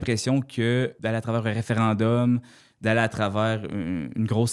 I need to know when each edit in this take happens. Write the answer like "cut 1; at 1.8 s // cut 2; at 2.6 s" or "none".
cut 1; at 1.0 s